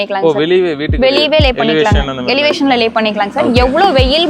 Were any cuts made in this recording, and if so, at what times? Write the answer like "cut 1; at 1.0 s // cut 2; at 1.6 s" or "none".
none